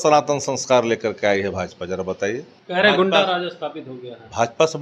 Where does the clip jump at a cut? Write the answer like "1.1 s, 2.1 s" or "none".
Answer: 2.5 s